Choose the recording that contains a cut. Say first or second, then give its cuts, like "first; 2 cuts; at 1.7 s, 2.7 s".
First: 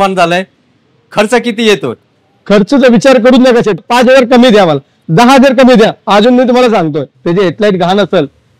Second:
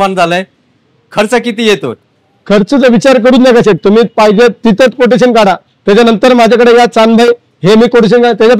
first; 2 cuts; at 3.8 s, 7.2 s